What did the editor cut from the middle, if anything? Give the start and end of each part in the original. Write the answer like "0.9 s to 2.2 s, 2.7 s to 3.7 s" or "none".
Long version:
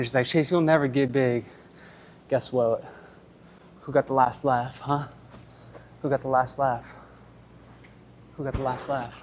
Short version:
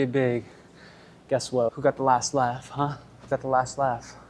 2.7 s to 3.8 s, 5.4 s to 6.1 s